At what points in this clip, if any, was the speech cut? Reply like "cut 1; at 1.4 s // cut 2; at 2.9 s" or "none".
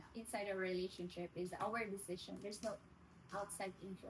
none